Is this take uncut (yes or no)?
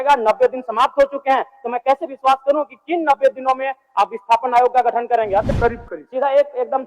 no